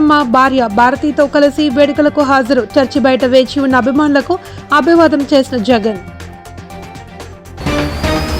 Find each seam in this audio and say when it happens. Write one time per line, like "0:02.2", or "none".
0:07.0

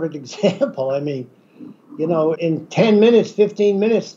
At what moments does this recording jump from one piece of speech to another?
0:02.4

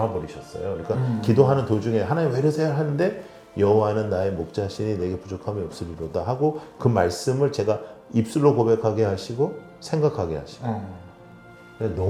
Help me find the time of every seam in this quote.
none

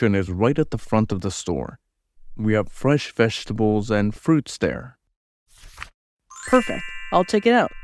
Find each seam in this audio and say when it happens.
0:06.1

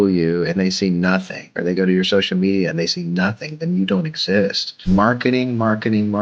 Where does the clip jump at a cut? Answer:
0:04.9

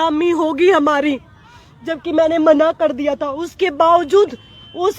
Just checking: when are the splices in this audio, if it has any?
none

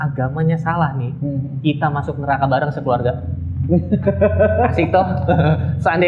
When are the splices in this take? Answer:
none

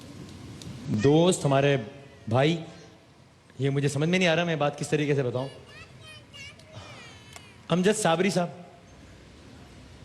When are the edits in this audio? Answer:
0:00.9

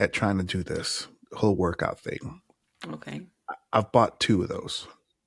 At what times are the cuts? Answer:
none

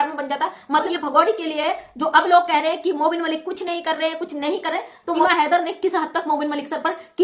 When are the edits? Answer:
0:00.9
0:05.2

